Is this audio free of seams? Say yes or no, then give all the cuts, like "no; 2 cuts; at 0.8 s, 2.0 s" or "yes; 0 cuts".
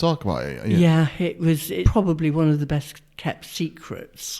no; 1 cut; at 1.9 s